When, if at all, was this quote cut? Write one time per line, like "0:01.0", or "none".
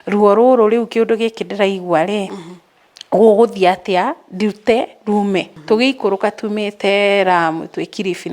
0:05.5